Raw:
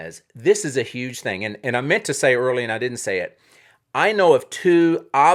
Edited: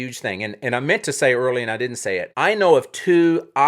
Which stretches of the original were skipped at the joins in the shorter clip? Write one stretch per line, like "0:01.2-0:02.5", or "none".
0:03.3-0:03.9